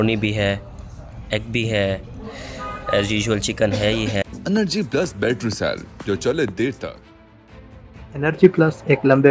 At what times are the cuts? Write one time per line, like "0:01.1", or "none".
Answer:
none